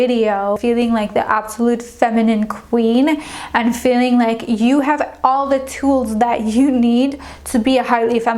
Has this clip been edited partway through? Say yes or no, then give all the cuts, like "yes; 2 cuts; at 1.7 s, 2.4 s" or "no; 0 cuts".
no; 0 cuts